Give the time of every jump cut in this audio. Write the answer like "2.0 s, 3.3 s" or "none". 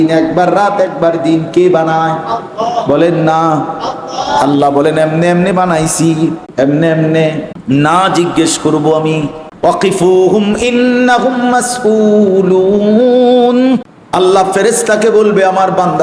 6.4 s, 7.5 s, 9.4 s, 14.0 s